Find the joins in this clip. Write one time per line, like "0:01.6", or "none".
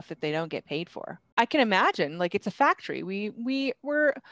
0:01.2

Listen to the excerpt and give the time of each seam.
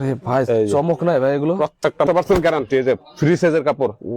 0:02.1

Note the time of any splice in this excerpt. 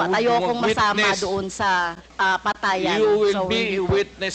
0:02.1

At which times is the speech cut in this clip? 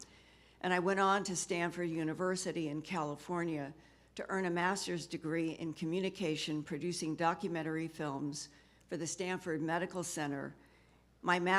none

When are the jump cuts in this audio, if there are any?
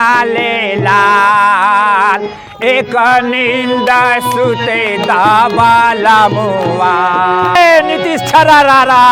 0:07.5

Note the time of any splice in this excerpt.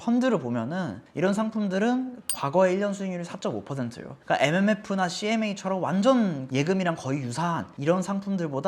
0:01.0

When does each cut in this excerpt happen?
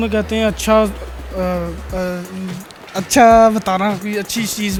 none

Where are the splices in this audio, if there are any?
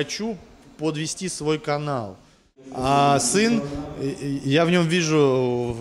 0:02.7

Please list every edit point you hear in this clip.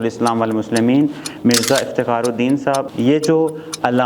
0:02.9

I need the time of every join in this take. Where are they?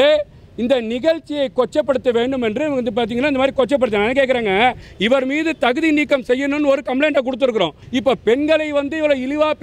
0:04.9
0:07.8

